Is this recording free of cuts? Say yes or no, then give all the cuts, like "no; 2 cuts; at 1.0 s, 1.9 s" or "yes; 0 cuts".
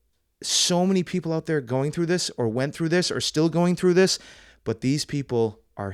yes; 0 cuts